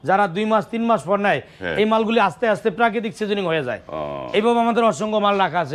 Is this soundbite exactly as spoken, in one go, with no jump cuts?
yes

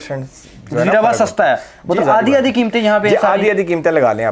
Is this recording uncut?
yes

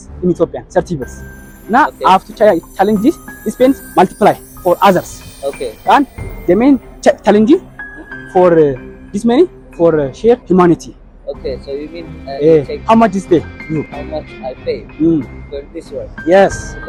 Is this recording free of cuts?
yes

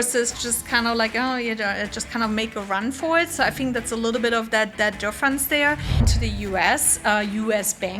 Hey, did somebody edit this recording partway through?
yes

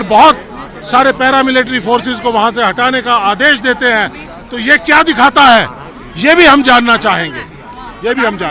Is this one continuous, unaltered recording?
yes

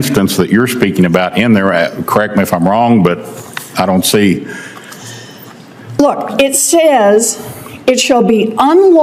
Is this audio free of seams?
yes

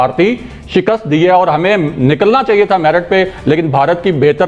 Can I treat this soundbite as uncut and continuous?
yes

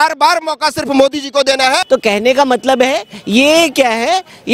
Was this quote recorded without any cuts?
no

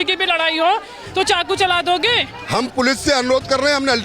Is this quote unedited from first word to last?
no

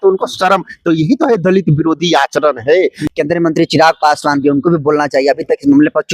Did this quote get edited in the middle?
yes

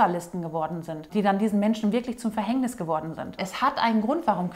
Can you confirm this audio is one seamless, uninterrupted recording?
no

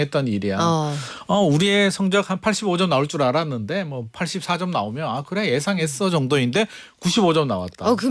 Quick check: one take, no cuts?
yes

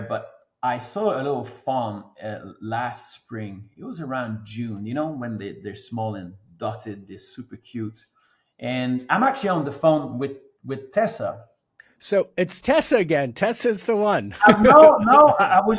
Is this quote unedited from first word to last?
yes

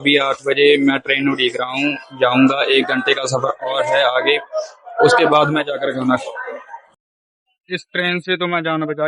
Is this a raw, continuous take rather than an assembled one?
no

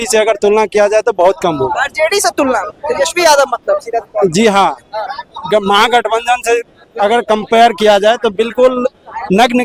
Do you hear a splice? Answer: no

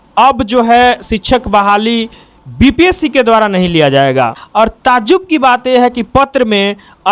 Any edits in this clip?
yes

